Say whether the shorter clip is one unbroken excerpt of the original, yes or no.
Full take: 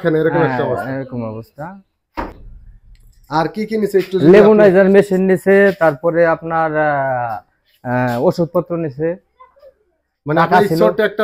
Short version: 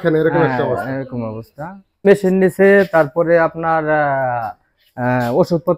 no